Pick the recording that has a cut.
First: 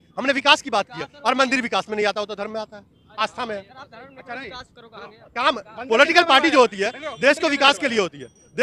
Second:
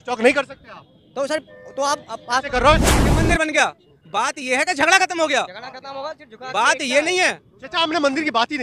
second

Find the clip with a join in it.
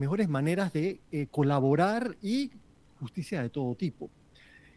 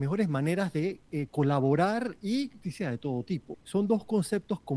second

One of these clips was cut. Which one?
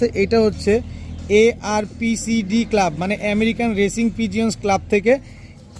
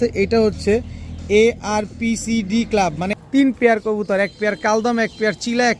second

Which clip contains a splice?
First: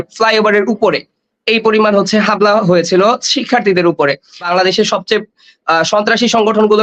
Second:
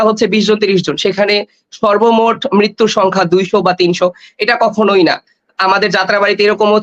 first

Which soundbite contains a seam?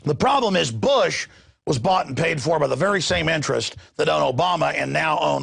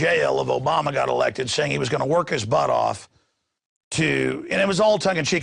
first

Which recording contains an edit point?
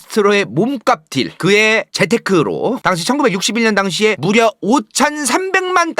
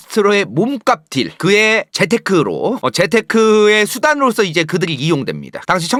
first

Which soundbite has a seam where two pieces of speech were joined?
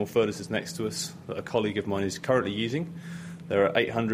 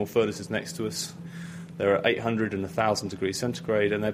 second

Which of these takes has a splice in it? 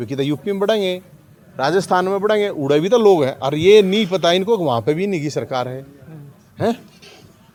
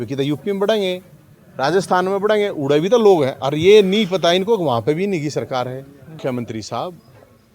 second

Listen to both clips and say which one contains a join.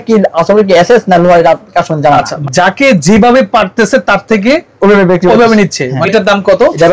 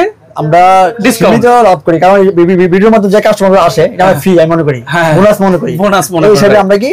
first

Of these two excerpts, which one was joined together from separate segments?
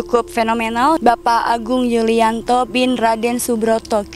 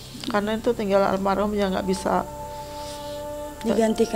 first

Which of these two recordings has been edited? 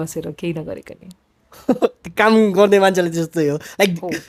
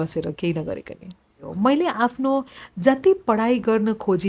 second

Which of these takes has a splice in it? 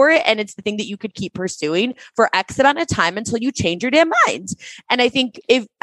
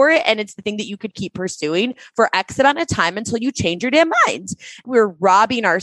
second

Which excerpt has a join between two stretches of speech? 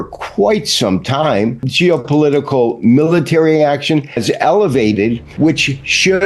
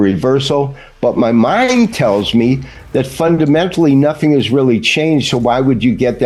first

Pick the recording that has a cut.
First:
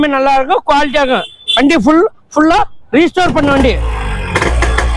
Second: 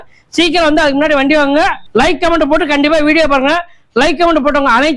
second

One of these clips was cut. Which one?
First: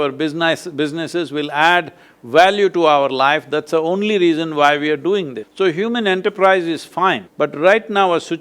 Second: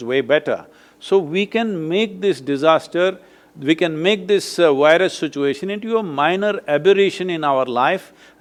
first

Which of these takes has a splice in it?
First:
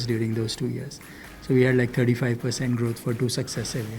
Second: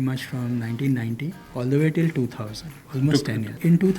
second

